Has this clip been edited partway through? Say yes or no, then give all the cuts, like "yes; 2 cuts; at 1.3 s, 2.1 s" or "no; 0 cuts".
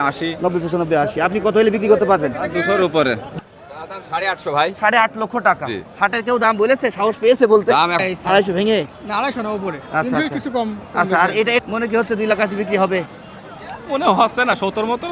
yes; 3 cuts; at 3.4 s, 8.0 s, 11.6 s